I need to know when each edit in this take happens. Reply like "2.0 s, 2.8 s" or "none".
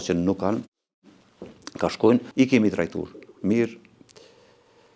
2.3 s

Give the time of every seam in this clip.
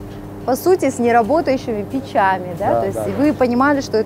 none

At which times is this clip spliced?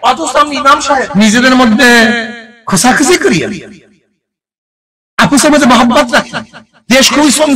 1.1 s

